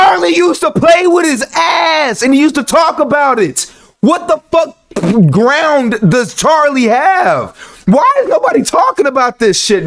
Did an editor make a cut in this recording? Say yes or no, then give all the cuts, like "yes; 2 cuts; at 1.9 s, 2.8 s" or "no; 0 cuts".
no; 0 cuts